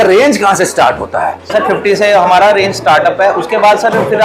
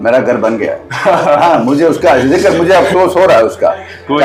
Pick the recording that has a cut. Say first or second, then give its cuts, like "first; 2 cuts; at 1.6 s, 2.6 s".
first; 1 cut; at 1.5 s